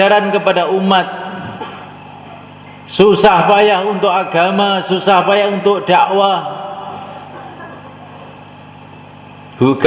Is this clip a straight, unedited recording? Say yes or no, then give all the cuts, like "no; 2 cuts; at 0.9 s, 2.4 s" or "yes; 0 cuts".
yes; 0 cuts